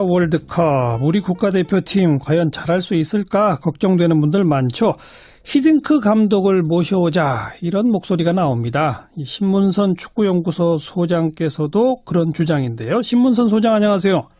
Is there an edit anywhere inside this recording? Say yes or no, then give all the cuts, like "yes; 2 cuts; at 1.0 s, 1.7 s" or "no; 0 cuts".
yes; 1 cut; at 10.5 s